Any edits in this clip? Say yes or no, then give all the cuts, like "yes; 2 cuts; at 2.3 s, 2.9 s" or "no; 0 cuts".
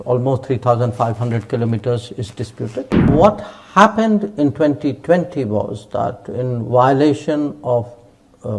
yes; 1 cut; at 3.1 s